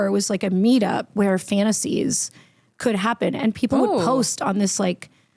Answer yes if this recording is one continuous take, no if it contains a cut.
no